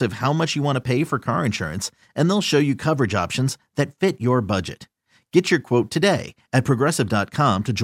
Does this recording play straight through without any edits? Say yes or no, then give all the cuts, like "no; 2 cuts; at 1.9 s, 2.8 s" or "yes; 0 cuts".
yes; 0 cuts